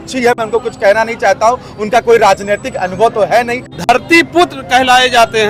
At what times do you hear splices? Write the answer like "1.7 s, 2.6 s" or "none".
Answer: 3.9 s